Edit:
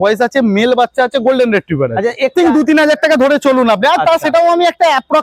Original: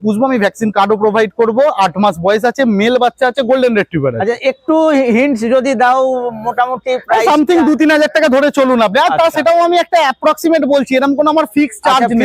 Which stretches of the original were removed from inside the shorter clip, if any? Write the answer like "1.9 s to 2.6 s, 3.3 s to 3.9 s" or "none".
4.6 s to 7.5 s